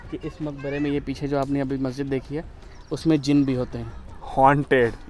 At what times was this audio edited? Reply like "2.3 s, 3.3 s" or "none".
none